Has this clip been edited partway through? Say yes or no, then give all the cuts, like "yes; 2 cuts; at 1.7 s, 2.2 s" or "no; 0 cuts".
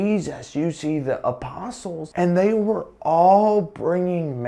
yes; 1 cut; at 2.0 s